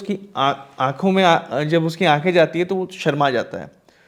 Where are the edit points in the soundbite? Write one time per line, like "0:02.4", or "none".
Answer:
none